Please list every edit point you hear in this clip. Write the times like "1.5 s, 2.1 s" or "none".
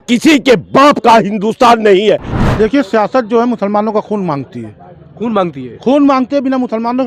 2.3 s